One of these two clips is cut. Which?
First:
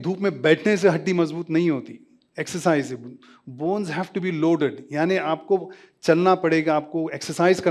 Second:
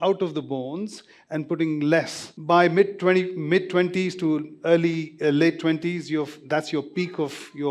second; 1 cut; at 2.2 s

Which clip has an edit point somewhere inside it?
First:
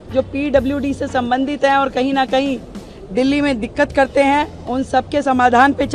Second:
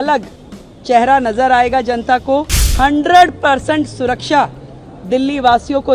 second; 1 cut; at 2.7 s

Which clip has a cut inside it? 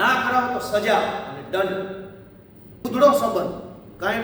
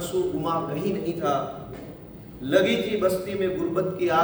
first; 1 cut; at 2.8 s

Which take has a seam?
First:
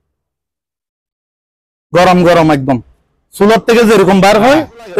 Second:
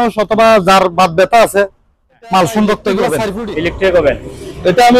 second; 1 cut; at 3.4 s

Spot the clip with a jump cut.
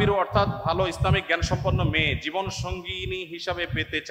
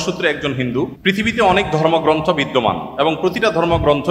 second; 1 cut; at 1.0 s

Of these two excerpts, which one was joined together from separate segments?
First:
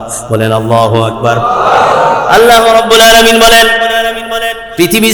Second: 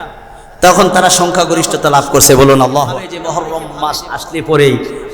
second; 1 cut; at 2.9 s

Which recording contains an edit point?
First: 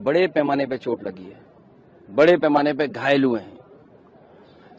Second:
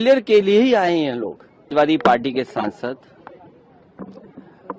second; 1 cut; at 1.6 s

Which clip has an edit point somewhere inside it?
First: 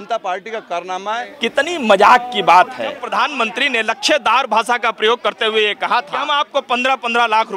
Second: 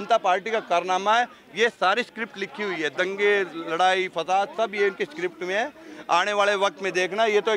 first; 3 cuts; at 1.3 s, 3.0 s, 6.2 s

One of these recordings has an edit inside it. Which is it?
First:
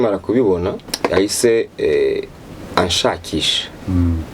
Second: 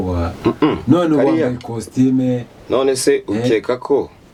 first; 1 cut; at 1.0 s

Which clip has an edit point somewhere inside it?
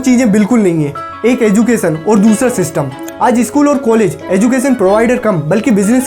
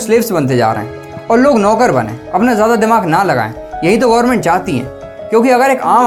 first; 1 cut; at 3.0 s

